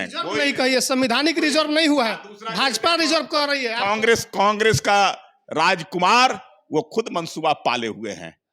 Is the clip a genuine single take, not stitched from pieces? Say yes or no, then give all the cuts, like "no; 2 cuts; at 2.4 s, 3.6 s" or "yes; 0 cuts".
yes; 0 cuts